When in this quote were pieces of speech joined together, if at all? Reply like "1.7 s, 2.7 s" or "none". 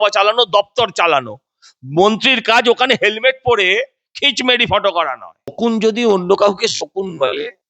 5.5 s